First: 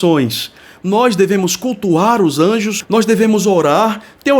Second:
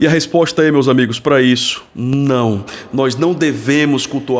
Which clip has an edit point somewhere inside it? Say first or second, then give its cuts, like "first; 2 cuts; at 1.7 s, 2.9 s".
first; 1 cut; at 2.8 s